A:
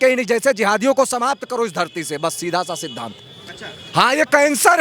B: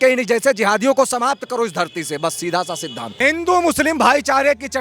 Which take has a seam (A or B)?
B